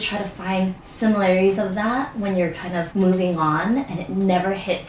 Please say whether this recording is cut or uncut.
cut